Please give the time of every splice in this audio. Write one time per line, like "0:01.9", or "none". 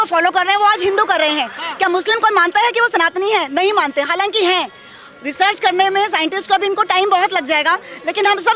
none